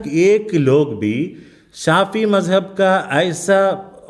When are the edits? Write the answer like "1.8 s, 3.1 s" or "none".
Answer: none